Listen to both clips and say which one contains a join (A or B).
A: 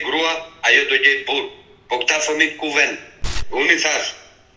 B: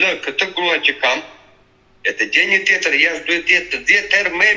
A